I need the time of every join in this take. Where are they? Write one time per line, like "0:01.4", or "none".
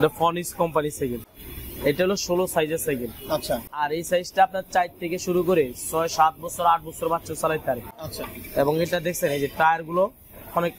none